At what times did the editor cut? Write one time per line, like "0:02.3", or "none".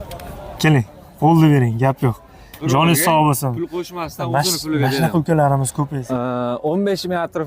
0:05.9